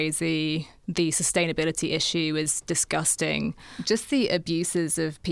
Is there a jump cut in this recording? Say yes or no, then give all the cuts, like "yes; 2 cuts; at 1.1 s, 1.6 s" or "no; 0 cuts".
yes; 1 cut; at 3.8 s